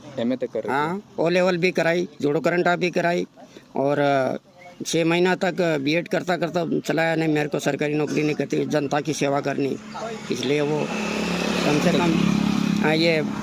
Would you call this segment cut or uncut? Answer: uncut